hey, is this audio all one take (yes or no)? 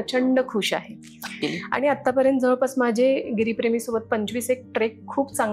no